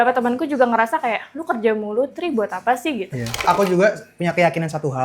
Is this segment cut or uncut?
cut